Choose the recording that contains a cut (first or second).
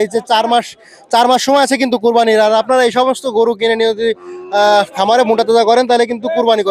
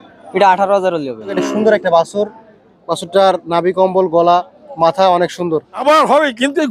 second